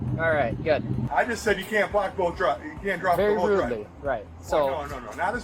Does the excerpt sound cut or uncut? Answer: cut